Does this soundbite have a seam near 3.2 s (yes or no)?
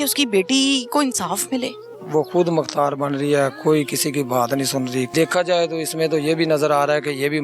no